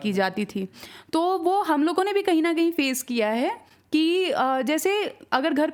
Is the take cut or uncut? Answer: uncut